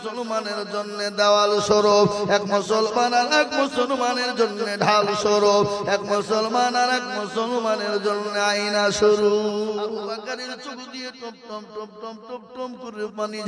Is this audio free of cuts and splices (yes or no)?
no